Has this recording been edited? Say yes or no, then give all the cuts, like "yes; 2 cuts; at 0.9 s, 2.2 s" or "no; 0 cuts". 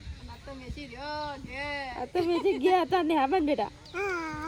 no; 0 cuts